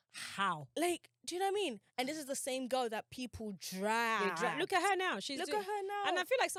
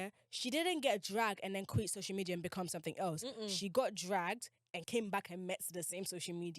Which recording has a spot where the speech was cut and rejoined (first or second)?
second